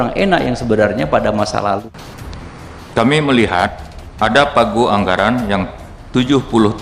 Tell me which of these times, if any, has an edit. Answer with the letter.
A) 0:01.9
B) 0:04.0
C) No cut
A